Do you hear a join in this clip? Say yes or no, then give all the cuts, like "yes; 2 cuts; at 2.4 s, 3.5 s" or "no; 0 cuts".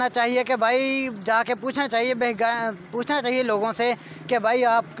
no; 0 cuts